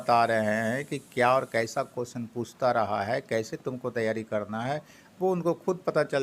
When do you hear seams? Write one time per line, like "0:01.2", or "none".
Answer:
none